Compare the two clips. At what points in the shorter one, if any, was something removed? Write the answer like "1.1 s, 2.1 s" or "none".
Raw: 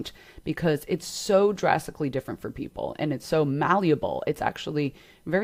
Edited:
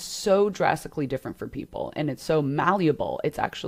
none

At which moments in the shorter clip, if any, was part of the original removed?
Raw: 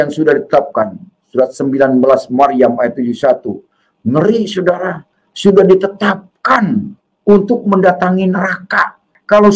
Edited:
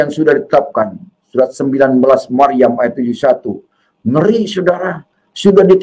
none

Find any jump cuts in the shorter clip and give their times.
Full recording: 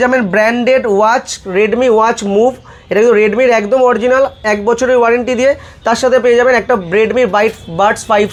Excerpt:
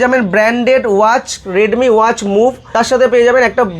2.6 s

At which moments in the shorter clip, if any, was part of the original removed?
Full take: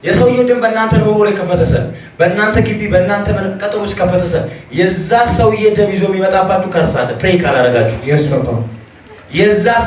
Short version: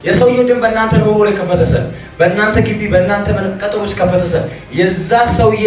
none

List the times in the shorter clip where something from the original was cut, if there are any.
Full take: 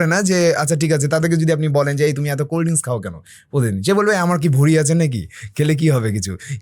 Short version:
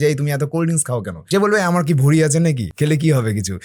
1.2 s, 2.7 s

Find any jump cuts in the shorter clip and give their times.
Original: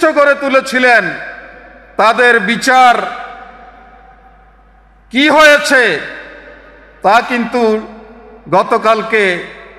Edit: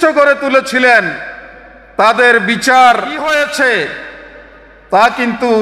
3.2 s

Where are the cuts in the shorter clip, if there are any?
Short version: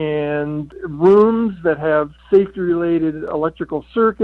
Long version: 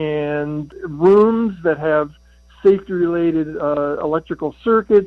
2.2 s, 3.2 s

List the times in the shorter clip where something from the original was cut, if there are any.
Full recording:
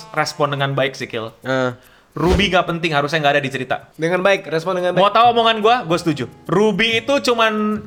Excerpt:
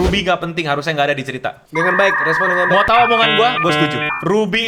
none

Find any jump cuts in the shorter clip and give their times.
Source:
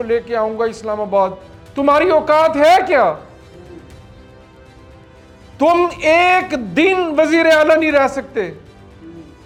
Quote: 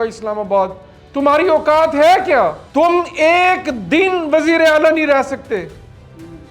2.6 s

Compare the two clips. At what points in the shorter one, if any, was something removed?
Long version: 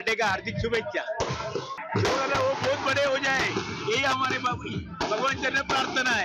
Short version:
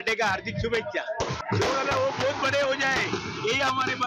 1.4 s

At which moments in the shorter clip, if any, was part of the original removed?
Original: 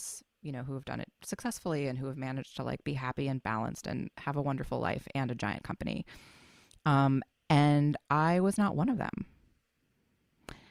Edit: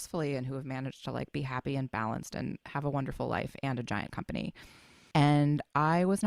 5.0 s

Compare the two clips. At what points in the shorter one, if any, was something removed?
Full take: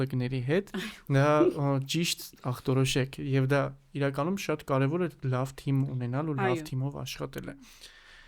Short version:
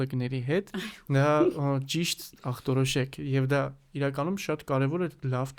none

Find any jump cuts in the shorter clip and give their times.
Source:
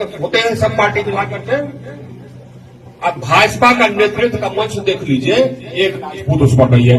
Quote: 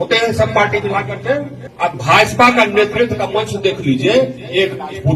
1.6 s

